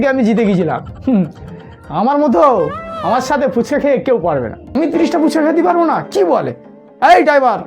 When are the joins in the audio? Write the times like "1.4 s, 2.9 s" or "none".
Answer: 4.8 s